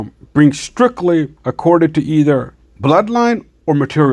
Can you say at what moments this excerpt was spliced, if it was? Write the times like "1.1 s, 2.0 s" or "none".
1.4 s